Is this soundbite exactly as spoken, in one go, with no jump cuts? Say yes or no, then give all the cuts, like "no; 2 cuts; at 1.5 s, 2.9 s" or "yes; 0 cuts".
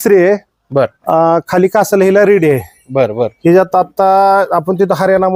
yes; 0 cuts